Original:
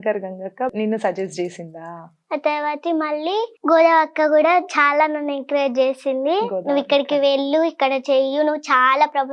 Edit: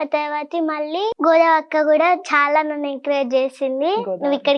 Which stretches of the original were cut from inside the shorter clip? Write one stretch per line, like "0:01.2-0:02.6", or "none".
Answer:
0:03.5-0:03.6